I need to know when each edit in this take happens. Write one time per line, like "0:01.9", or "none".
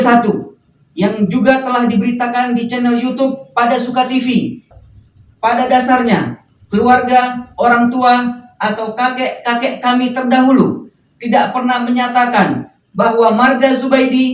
0:04.7